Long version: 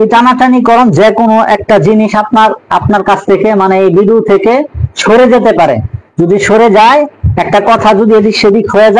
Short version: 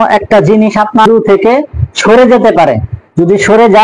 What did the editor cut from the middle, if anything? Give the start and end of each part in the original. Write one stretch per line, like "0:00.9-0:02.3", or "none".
0:02.4-0:04.1